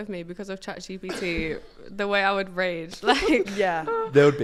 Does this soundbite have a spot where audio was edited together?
no; 0 cuts

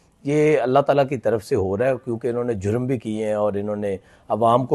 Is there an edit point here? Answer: no; 0 cuts

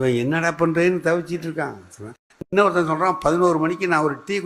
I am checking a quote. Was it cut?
no; 0 cuts

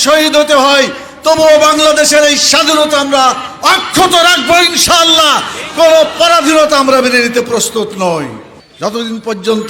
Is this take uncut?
no; 1 cut; at 8.5 s

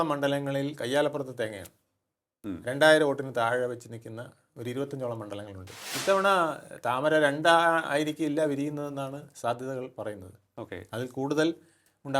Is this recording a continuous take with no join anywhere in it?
no; 1 cut; at 5.8 s

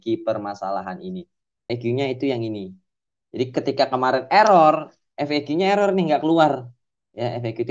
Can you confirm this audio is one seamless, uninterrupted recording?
no; 1 cut; at 1.6 s

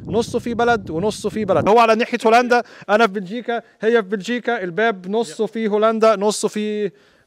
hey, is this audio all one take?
no; 1 cut; at 1.6 s

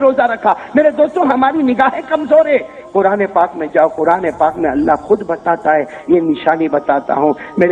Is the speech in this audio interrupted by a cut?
no; 0 cuts

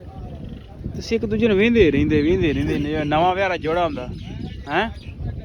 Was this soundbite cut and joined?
no; 0 cuts

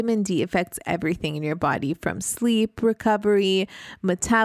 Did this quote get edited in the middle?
no; 0 cuts

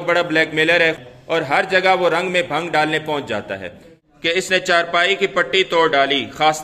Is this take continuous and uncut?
no; 2 cuts; at 1.0 s, 4.4 s

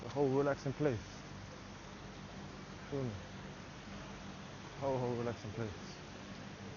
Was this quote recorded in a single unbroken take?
yes; 0 cuts

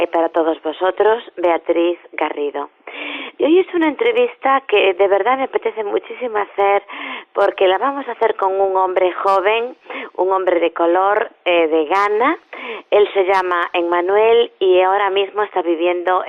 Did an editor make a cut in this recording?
no; 0 cuts

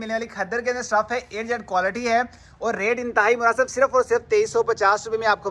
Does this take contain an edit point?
no; 0 cuts

